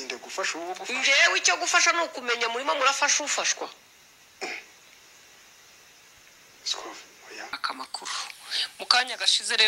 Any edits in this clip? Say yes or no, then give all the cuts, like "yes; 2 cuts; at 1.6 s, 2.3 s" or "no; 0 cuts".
yes; 1 cut; at 7.5 s